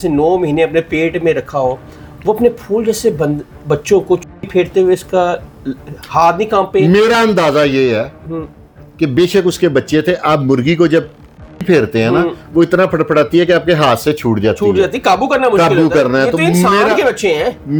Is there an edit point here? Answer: no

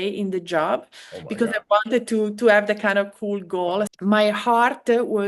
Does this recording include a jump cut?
yes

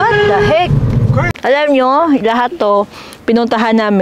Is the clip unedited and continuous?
no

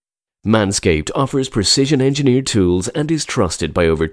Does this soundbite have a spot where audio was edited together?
no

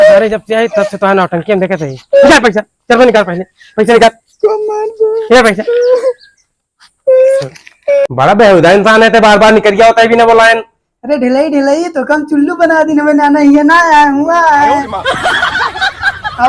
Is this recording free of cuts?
no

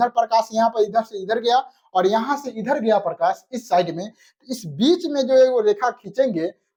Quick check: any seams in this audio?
no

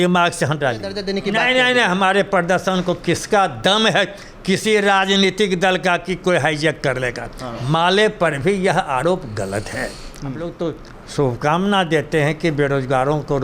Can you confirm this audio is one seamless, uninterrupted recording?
no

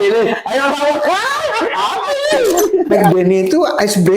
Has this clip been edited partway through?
yes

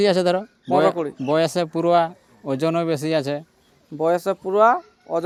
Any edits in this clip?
no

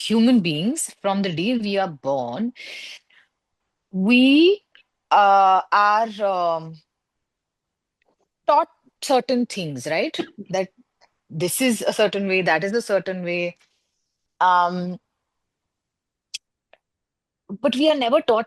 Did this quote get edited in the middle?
no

